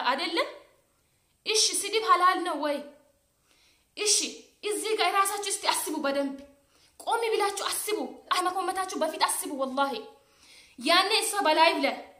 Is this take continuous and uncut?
no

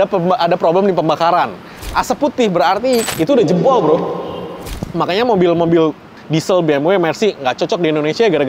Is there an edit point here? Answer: yes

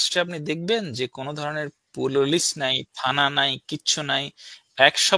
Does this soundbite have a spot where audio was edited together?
no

